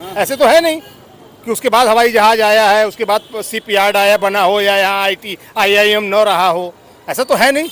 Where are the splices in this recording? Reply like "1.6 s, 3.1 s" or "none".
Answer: none